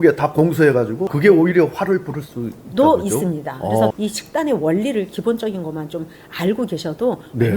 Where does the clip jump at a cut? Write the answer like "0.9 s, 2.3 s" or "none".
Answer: 1.0 s, 3.9 s